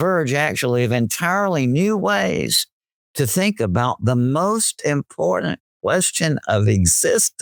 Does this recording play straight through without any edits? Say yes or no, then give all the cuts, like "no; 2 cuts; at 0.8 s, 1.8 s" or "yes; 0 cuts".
yes; 0 cuts